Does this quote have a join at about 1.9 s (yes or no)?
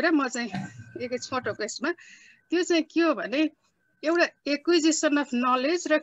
no